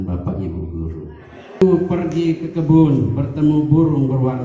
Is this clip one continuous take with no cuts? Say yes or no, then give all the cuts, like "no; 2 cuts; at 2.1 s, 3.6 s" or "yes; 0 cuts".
no; 1 cut; at 1.6 s